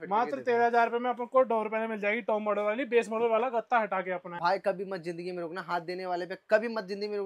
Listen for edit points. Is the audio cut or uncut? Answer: cut